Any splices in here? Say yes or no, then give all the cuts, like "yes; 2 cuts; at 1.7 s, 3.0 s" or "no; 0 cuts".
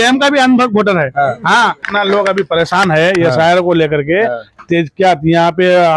yes; 1 cut; at 1.8 s